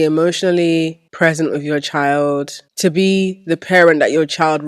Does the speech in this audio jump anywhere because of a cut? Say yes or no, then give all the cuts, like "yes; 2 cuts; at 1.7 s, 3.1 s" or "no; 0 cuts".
yes; 2 cuts; at 1.0 s, 2.6 s